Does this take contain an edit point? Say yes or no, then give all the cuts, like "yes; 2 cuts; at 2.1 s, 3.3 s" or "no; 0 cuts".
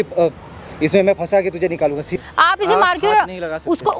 yes; 1 cut; at 2.1 s